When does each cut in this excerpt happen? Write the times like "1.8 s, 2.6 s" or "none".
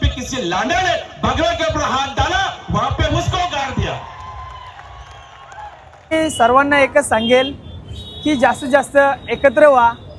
6.1 s